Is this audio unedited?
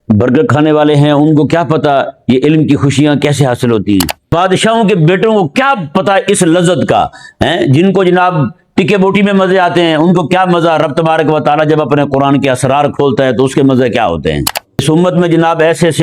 no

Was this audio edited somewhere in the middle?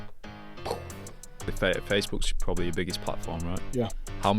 yes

